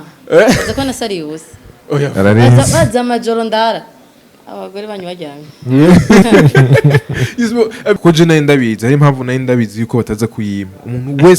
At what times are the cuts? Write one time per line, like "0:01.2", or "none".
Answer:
0:08.0